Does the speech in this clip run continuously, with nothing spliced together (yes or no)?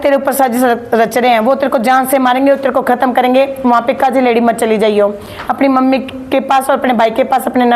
yes